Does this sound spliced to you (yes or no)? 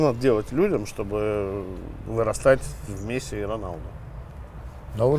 no